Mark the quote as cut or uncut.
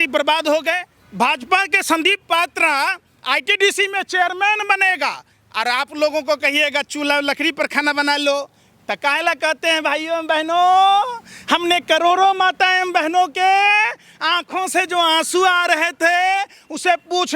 cut